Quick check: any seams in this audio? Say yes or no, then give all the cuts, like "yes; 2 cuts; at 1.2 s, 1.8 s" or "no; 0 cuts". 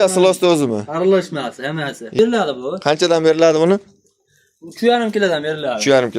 yes; 1 cut; at 2.1 s